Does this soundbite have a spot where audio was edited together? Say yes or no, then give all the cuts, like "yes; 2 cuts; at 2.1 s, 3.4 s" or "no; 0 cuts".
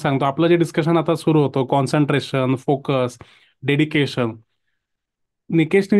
no; 0 cuts